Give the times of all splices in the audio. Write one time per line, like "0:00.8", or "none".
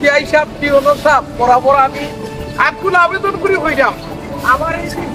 none